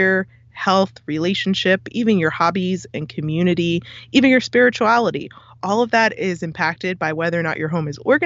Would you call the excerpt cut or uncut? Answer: uncut